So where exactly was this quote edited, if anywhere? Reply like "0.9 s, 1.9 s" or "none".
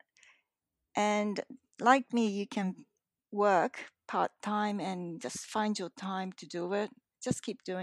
none